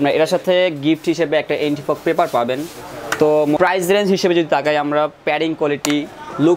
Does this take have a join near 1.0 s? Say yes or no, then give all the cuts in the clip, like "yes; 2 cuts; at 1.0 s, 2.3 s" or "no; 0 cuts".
no; 1 cut; at 3.6 s